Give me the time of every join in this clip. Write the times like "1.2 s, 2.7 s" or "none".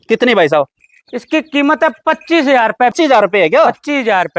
2.9 s